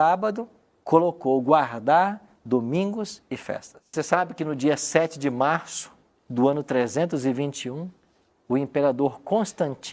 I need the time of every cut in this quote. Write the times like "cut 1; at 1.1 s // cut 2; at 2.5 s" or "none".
cut 1; at 3.9 s